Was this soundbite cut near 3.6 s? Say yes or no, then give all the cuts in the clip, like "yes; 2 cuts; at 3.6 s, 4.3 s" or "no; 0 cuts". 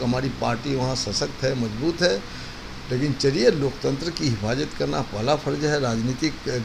no; 0 cuts